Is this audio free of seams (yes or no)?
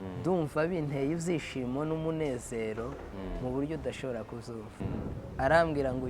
no